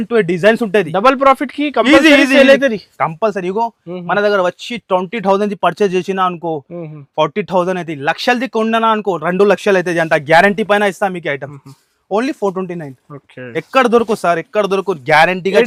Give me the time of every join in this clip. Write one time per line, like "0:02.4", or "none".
none